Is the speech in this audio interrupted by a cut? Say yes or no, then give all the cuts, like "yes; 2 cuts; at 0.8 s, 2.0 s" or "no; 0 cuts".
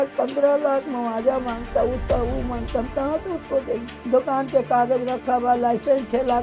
yes; 1 cut; at 3.9 s